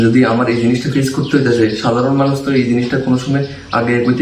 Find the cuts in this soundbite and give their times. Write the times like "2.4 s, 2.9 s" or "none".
none